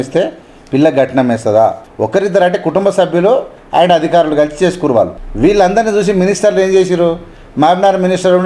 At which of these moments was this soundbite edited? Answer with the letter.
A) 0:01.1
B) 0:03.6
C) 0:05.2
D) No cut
C